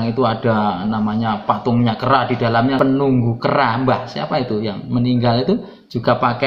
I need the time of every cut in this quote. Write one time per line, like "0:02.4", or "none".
0:02.8